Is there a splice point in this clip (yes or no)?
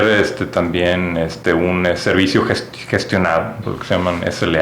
yes